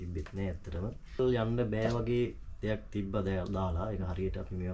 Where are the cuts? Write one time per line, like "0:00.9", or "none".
0:01.2